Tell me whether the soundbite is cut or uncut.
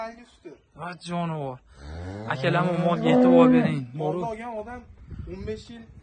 uncut